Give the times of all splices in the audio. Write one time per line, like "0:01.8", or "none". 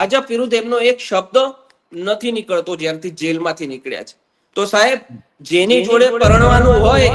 none